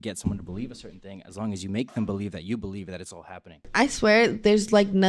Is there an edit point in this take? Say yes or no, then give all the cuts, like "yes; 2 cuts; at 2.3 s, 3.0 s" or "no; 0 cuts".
yes; 1 cut; at 3.7 s